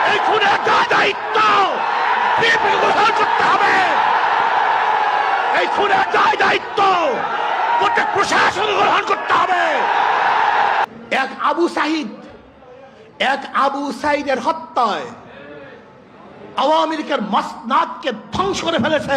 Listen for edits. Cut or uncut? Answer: cut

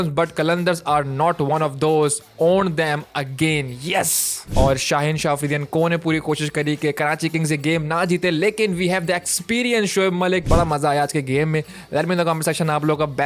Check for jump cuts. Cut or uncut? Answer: cut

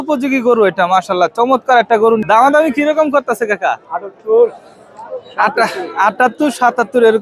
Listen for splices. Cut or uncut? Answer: cut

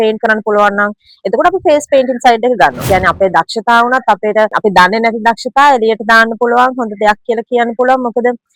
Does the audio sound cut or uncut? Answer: cut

